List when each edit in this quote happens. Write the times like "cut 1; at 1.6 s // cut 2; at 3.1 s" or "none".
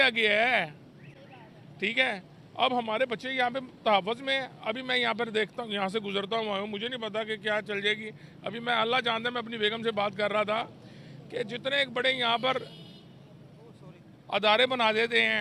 none